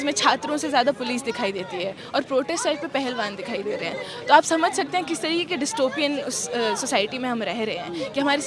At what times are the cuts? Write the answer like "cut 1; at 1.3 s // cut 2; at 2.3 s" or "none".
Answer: none